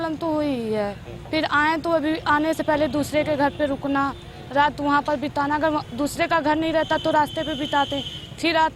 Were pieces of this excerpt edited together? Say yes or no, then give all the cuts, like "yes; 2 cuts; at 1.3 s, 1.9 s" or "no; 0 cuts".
no; 0 cuts